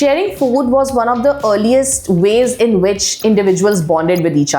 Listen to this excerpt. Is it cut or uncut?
uncut